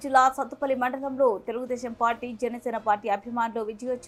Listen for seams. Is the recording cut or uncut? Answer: uncut